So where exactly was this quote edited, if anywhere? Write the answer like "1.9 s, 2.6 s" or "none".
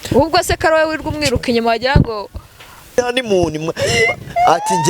2.9 s